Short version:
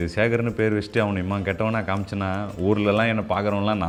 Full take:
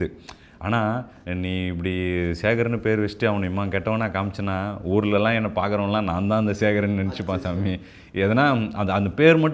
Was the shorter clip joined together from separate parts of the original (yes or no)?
no